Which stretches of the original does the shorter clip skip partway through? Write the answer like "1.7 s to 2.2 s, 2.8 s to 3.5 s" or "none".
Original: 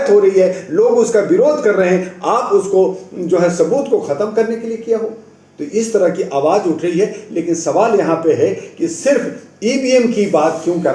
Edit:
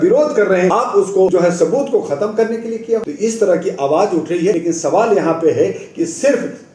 2.2 s to 2.9 s, 5.0 s to 5.6 s, 7.1 s to 7.4 s